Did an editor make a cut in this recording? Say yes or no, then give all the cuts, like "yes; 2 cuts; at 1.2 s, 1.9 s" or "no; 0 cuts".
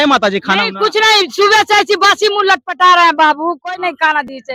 no; 0 cuts